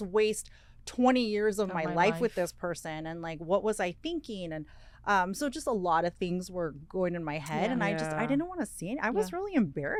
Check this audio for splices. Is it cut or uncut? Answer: uncut